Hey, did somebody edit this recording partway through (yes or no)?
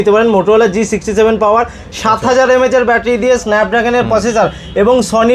no